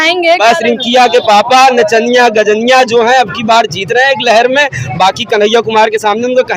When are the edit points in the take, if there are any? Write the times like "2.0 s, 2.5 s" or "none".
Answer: none